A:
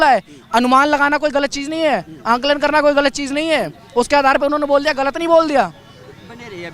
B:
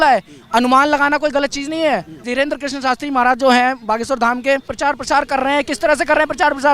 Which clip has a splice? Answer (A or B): B